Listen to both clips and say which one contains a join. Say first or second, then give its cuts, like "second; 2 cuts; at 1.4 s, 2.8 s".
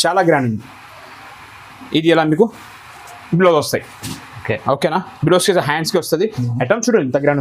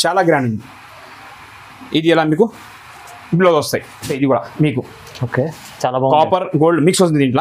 second; 1 cut; at 4.1 s